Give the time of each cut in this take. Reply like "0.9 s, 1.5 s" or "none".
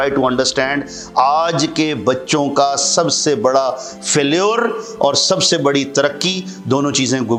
none